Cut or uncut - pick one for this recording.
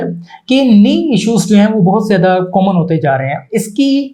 uncut